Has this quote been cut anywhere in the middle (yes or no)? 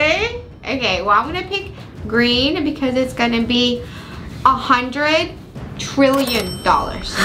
no